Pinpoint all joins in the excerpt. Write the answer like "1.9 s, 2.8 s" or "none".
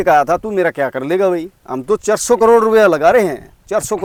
none

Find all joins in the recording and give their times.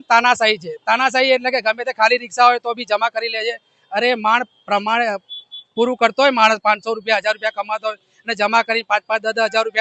none

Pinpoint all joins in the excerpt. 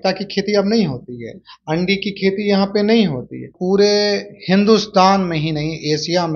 3.5 s

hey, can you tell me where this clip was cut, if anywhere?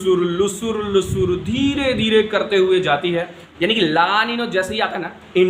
3.4 s

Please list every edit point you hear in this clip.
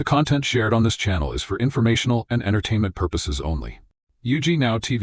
none

